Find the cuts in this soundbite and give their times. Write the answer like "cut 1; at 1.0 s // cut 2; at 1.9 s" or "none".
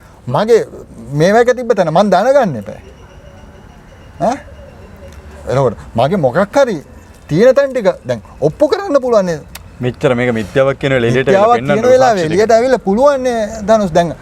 none